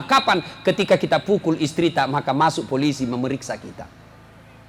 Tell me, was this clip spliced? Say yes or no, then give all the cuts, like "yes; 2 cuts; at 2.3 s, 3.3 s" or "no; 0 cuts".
no; 0 cuts